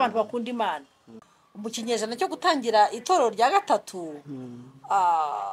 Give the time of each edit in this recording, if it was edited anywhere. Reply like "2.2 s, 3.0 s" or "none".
1.2 s